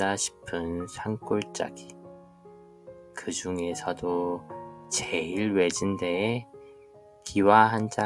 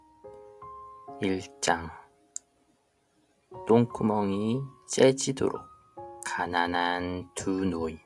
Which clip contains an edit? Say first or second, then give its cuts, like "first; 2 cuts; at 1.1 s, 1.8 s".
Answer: second; 1 cut; at 1.2 s